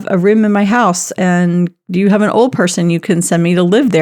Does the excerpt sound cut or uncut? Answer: uncut